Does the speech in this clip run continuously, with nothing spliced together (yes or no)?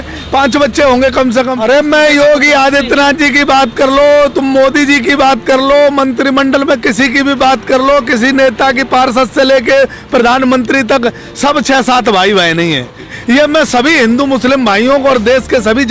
no